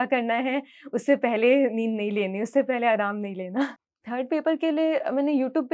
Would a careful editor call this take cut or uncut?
cut